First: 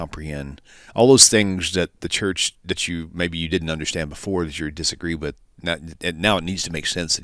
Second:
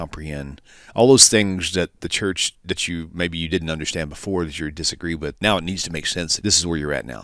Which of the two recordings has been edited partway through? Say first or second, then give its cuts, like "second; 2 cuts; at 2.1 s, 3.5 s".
second; 2 cuts; at 5.4 s, 6.3 s